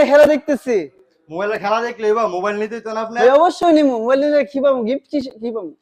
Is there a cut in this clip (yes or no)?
no